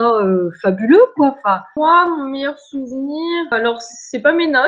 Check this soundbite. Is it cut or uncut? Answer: cut